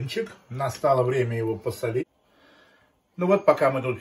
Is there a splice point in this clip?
yes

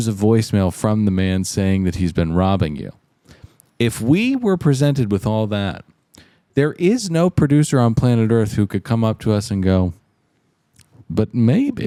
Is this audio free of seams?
yes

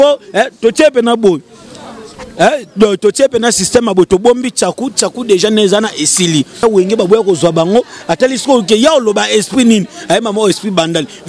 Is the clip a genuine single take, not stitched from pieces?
no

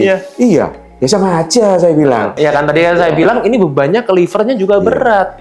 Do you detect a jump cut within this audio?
yes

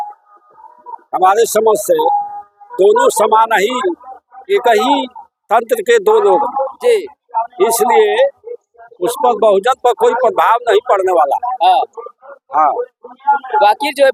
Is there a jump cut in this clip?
no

